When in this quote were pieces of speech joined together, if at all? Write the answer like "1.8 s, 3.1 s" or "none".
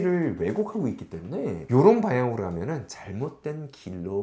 none